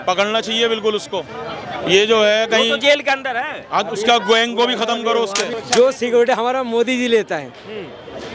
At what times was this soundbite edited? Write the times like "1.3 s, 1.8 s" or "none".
5.4 s

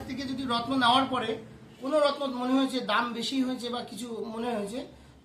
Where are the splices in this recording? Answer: none

